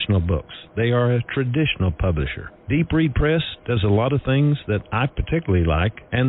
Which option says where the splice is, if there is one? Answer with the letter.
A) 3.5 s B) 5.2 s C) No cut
B